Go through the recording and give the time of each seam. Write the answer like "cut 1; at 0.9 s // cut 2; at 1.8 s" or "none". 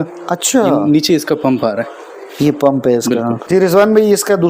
cut 1; at 3.4 s